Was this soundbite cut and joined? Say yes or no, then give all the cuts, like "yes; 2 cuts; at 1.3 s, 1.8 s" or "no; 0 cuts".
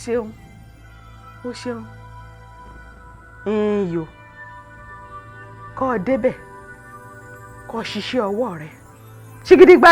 yes; 2 cuts; at 1.9 s, 3.3 s